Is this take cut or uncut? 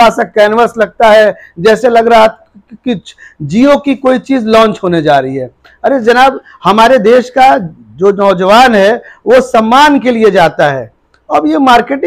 uncut